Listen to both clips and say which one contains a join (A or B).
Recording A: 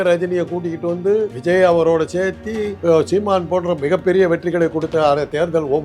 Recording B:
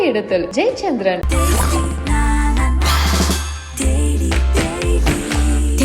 A